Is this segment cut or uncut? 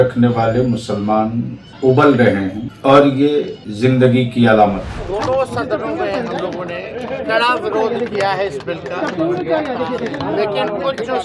cut